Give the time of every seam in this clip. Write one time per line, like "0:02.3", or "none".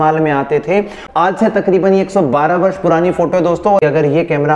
0:01.3
0:03.8